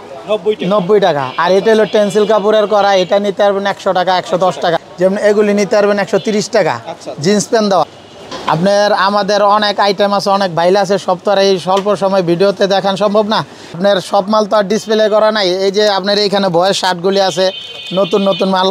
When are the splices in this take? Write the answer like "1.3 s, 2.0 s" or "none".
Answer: 4.8 s, 7.8 s, 13.6 s